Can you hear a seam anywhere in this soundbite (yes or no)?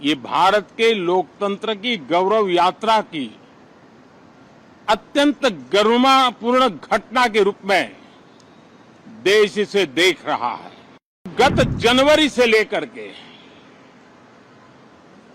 yes